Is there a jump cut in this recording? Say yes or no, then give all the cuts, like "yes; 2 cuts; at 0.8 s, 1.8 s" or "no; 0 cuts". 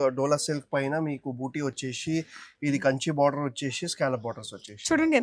no; 0 cuts